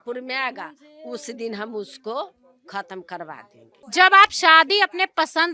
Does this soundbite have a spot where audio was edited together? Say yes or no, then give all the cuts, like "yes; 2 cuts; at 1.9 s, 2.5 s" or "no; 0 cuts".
yes; 1 cut; at 3.8 s